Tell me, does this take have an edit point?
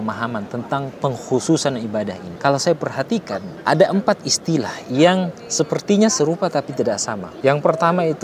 no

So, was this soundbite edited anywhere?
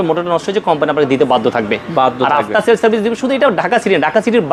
no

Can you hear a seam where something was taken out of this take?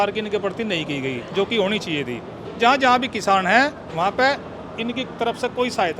yes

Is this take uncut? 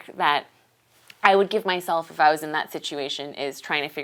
yes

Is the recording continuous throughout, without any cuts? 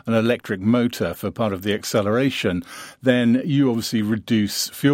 yes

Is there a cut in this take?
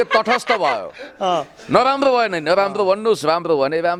no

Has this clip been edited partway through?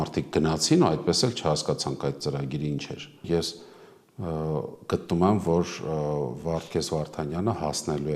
yes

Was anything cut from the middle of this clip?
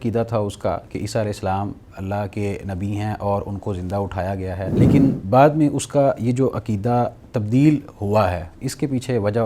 yes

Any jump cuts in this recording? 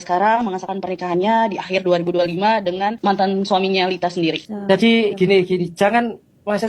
yes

